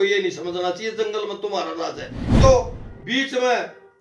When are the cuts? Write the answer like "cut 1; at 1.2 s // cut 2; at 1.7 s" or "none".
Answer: cut 1; at 2.4 s